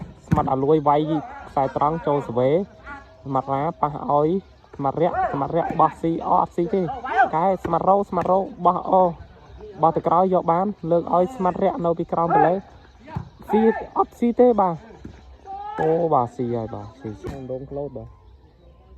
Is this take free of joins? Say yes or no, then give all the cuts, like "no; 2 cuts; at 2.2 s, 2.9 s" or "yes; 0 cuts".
no; 1 cut; at 17.3 s